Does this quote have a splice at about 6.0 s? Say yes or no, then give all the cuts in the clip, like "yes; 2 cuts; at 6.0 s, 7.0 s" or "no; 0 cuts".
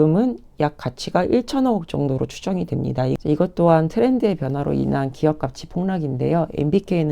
no; 1 cut; at 3.2 s